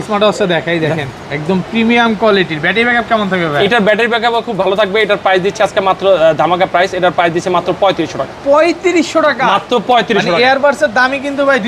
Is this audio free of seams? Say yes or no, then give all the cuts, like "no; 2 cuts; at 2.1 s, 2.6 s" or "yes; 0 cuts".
yes; 0 cuts